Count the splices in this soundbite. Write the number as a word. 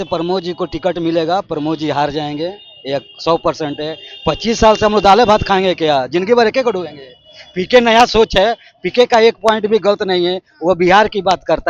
zero